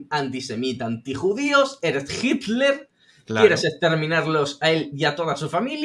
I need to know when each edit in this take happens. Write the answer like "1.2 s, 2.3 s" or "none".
none